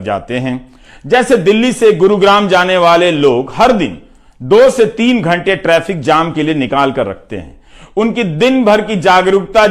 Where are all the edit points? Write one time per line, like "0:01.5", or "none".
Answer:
none